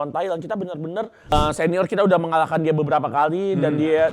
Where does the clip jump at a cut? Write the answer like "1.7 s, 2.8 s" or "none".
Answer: 1.3 s